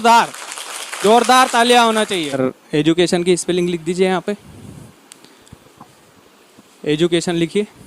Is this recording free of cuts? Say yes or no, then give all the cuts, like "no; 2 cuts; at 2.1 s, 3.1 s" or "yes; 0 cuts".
no; 1 cut; at 2.4 s